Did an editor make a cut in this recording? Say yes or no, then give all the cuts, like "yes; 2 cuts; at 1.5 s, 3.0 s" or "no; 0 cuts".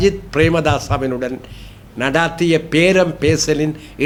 no; 0 cuts